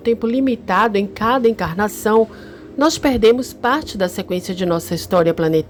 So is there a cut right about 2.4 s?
no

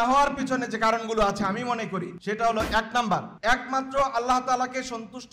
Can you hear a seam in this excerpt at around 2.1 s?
yes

